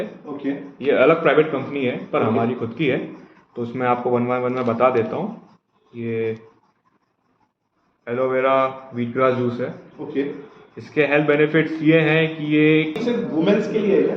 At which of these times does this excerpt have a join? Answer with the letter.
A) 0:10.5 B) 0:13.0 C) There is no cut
B